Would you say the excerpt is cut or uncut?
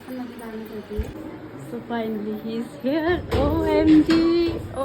cut